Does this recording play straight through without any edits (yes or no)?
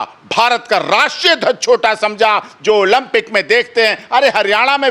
yes